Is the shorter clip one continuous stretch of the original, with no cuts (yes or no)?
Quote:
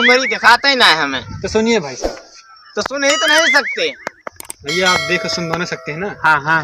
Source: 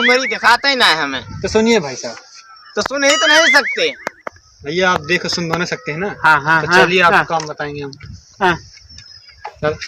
yes